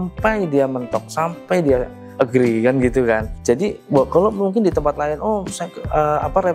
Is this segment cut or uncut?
uncut